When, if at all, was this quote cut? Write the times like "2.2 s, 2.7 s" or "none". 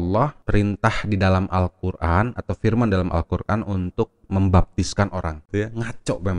5.4 s